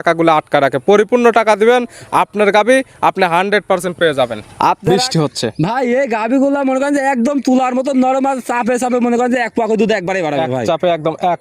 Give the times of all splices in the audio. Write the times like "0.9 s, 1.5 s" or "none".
4.9 s